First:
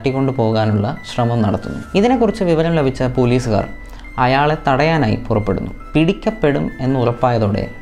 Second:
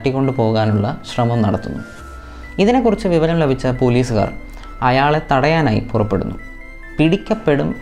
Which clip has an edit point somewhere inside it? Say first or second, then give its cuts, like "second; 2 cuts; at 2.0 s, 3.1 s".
first; 2 cuts; at 1.8 s, 5.7 s